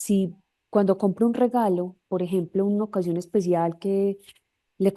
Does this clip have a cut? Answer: no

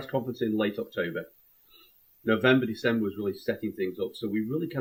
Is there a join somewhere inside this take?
no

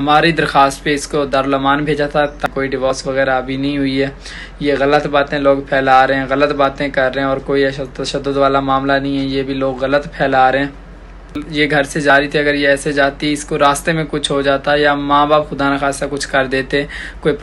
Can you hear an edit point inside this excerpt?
yes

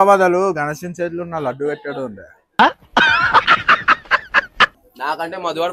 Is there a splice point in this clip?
yes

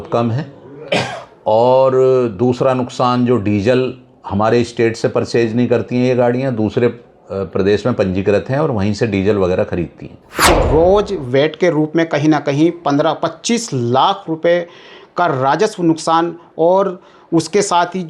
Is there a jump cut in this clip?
yes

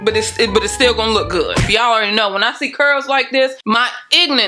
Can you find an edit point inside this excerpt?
yes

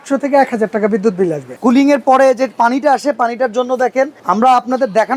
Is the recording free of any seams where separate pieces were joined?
no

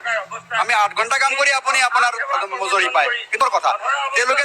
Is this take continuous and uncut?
no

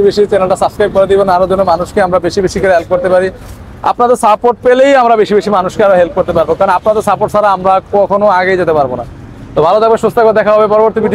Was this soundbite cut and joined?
no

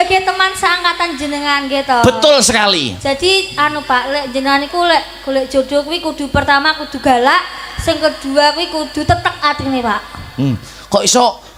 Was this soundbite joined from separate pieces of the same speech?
no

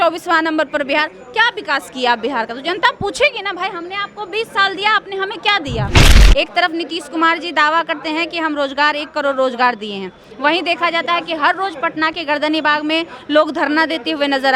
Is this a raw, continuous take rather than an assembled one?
no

